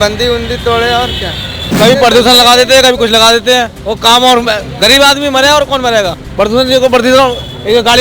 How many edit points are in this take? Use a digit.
3